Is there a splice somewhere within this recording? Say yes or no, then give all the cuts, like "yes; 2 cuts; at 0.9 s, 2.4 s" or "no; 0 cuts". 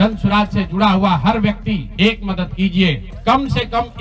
yes; 2 cuts; at 1.9 s, 3.1 s